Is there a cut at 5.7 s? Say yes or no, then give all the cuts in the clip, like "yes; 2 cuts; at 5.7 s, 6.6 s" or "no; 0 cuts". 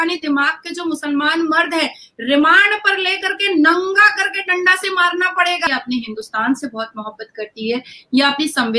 yes; 1 cut; at 5.7 s